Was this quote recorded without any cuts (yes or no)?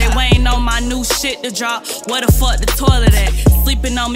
yes